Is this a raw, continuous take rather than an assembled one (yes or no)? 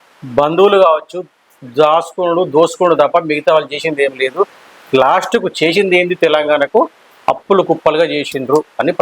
yes